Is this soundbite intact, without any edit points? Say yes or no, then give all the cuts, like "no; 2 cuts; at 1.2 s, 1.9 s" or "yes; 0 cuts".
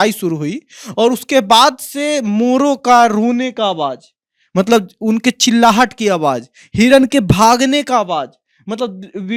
yes; 0 cuts